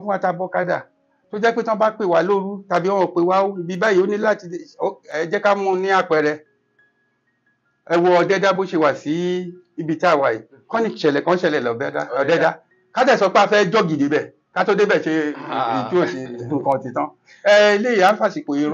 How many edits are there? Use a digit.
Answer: 0